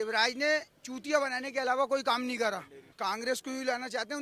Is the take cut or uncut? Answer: cut